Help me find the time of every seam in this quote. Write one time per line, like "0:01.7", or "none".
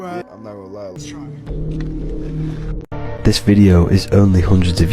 0:01.0